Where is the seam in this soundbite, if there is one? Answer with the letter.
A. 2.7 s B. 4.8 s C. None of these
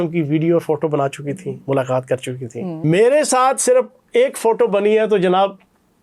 A